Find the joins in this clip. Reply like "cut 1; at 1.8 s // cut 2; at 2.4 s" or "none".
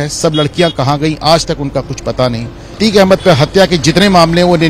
cut 1; at 2.8 s

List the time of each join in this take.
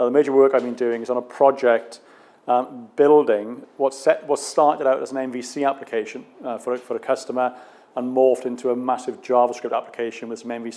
none

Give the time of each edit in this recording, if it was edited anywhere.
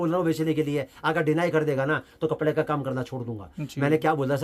none

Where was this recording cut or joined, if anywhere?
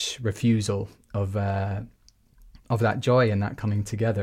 none

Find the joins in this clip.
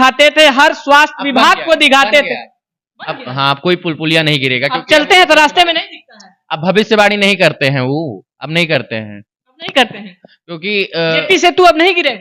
none

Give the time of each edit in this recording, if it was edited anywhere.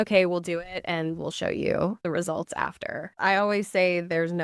cut 1; at 3.1 s

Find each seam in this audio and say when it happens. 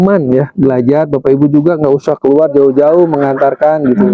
none

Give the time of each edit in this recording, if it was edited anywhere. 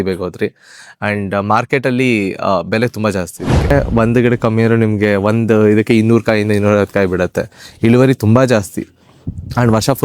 cut 1; at 3.7 s

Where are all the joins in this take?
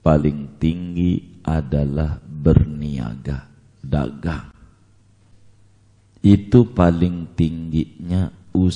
cut 1; at 5.3 s

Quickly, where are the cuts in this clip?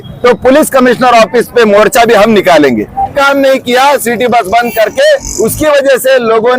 cut 1; at 3.1 s

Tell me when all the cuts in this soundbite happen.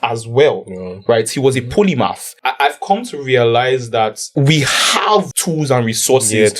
cut 1; at 2.3 s // cut 2; at 4.2 s // cut 3; at 5.4 s

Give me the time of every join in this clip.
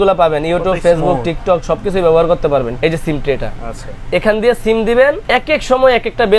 cut 1; at 2.7 s // cut 2; at 5.2 s

